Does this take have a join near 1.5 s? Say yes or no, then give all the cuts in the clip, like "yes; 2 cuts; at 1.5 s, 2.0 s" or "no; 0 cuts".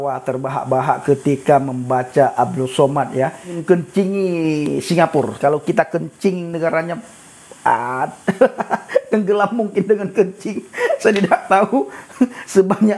no; 2 cuts; at 3.5 s, 5.3 s